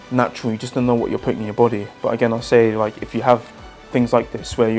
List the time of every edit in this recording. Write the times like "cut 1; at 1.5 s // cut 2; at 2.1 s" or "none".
cut 1; at 1.9 s